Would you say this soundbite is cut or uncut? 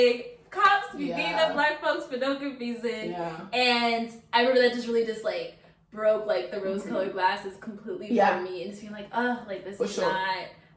uncut